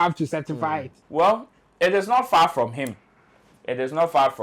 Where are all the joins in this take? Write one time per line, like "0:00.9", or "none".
0:01.0